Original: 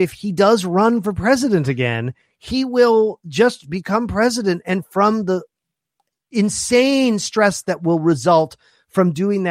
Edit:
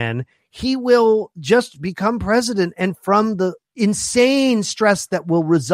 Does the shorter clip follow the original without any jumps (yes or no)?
no